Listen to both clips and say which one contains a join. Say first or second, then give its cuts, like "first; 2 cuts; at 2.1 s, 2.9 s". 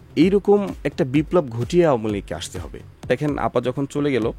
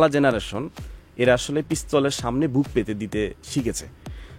first; 1 cut; at 3.1 s